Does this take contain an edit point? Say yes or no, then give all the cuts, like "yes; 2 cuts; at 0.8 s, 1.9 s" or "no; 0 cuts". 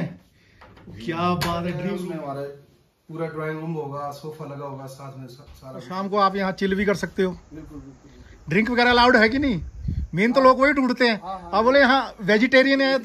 yes; 2 cuts; at 1.9 s, 5.8 s